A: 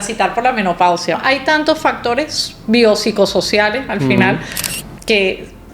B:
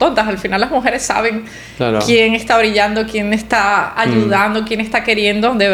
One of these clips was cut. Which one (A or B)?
A